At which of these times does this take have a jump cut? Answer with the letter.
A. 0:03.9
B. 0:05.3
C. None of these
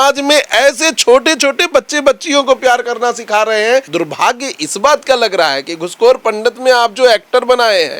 A